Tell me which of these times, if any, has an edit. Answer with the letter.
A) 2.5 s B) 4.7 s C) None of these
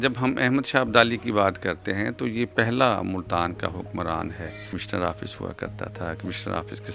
B